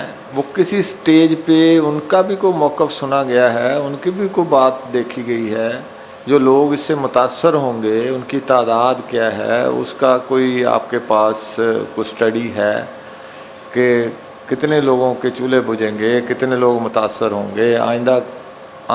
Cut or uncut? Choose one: uncut